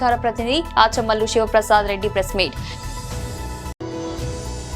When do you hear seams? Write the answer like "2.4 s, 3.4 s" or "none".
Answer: 3.7 s